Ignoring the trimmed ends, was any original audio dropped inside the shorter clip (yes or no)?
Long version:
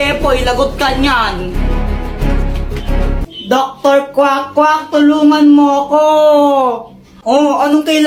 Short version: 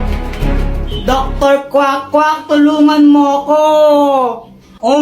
yes